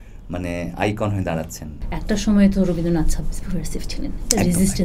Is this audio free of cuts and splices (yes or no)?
no